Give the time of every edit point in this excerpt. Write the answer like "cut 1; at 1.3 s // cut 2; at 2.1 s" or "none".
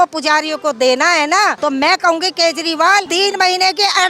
cut 1; at 1.6 s // cut 2; at 3.1 s